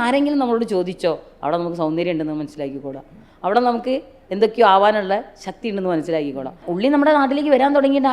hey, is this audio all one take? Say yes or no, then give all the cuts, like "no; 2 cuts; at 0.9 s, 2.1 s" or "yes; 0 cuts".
no; 1 cut; at 6.6 s